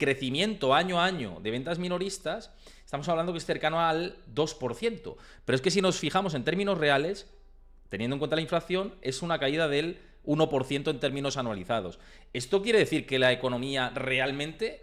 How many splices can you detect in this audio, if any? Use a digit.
0